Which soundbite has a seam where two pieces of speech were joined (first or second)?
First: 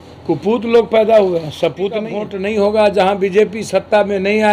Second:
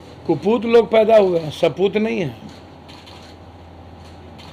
first